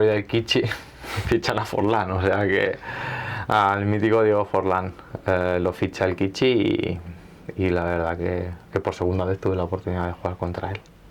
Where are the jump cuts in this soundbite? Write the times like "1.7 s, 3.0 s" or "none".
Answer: none